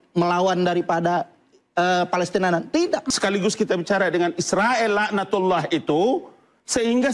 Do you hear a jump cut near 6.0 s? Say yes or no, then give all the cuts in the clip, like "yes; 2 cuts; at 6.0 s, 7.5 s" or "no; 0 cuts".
no; 1 cut; at 3.0 s